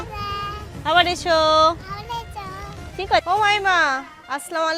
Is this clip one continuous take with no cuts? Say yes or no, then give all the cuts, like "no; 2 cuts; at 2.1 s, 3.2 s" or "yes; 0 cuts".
no; 1 cut; at 3.2 s